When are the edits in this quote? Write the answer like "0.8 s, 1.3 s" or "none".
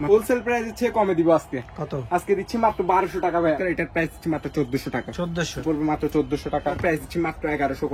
3.6 s, 5.6 s, 6.8 s